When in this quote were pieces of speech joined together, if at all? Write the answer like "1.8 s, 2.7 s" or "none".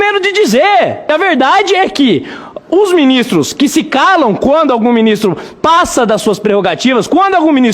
1.1 s